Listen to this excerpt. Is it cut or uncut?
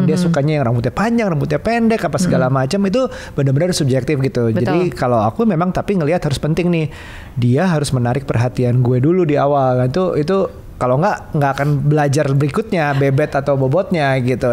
uncut